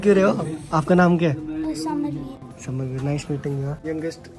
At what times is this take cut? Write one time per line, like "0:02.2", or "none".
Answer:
none